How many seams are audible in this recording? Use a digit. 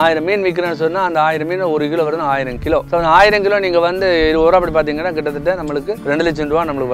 2